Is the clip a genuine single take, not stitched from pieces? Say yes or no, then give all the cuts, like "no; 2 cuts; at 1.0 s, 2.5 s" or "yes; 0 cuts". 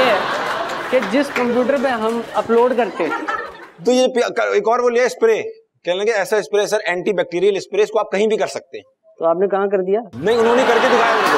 no; 1 cut; at 3.7 s